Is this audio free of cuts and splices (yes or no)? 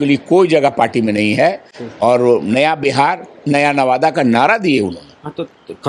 yes